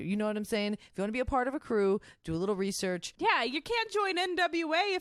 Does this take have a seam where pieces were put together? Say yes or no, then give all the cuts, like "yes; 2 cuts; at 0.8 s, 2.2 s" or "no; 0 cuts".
yes; 1 cut; at 3.1 s